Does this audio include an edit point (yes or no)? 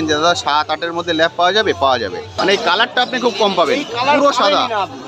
yes